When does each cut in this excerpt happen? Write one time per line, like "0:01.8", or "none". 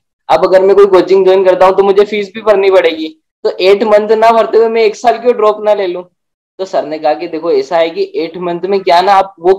none